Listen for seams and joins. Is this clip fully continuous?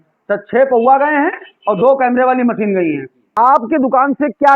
no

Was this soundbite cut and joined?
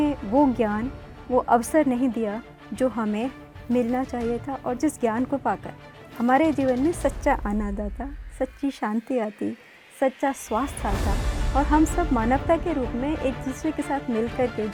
no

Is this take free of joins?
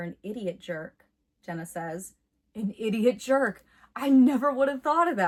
yes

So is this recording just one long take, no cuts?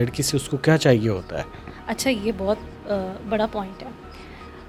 yes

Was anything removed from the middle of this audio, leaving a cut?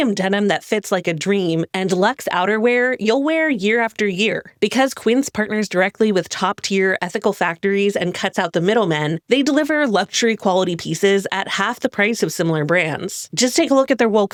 no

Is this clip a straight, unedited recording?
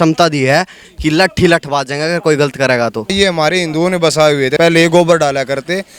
no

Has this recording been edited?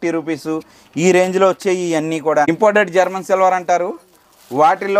yes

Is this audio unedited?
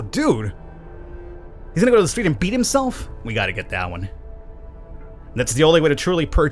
yes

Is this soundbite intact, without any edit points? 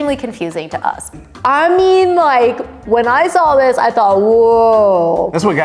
no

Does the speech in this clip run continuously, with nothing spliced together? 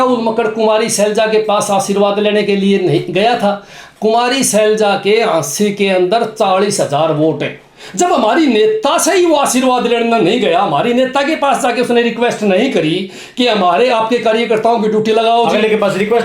yes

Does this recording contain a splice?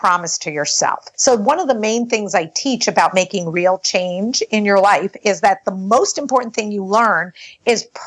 yes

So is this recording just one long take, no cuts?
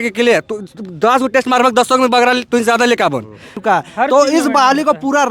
no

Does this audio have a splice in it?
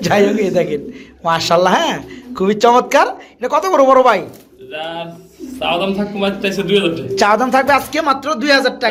no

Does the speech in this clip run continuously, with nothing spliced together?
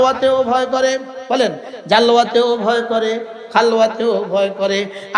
yes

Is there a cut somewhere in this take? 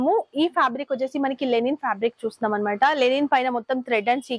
no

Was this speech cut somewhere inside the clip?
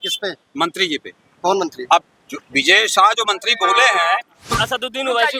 yes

